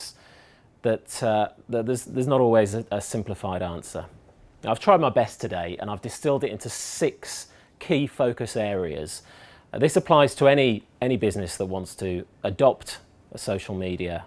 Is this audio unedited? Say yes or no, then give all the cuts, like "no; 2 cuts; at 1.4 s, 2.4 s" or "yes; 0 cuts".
no; 1 cut; at 8.4 s